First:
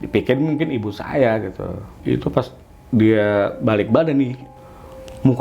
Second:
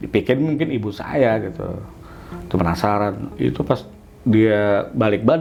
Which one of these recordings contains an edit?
first; 2 cuts; at 1.9 s, 4.5 s

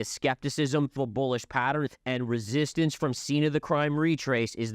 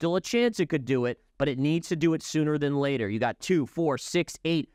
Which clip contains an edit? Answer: first; 2 cuts; at 1.0 s, 2.0 s

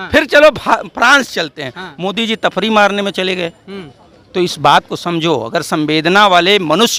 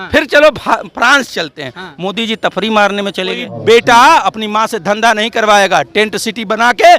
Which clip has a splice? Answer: second; 1 cut; at 3.5 s

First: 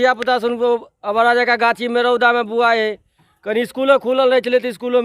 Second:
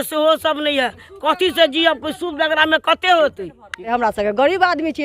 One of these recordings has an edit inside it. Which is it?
second; 1 cut; at 3.8 s

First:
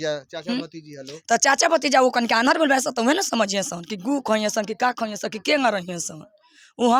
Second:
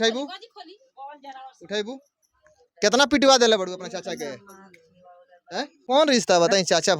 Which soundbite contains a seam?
second; 1 cut; at 5.6 s

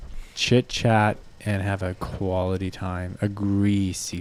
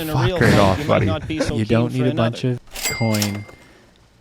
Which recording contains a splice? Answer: second; 2 cuts; at 1.5 s, 2.8 s

